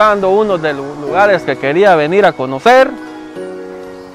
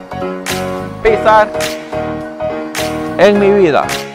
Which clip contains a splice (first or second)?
second